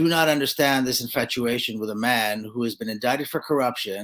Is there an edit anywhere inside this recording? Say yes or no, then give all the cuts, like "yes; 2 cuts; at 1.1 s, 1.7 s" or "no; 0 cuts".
no; 0 cuts